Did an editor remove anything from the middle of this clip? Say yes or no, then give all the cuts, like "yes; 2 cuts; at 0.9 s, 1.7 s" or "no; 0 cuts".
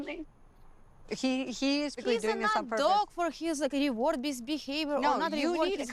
no; 0 cuts